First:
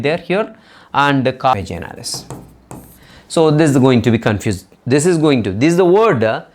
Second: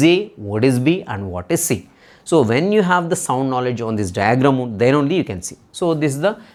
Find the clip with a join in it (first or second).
first